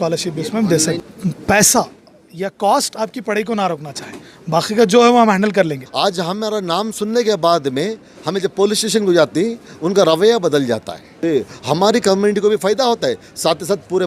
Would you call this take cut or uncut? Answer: cut